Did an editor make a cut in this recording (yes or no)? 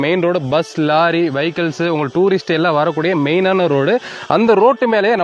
no